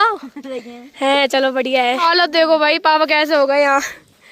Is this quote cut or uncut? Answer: cut